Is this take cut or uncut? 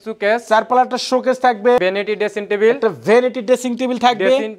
cut